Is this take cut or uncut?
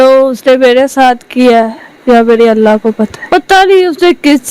cut